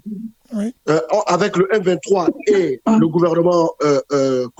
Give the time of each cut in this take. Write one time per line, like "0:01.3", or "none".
none